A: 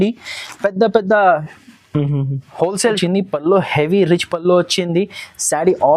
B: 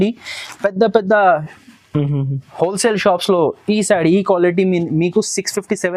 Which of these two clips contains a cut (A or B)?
A